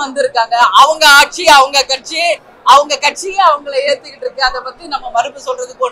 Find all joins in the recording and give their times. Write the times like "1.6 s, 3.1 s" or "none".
none